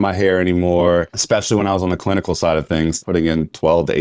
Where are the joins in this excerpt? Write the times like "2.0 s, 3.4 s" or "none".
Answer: 1.2 s, 3.0 s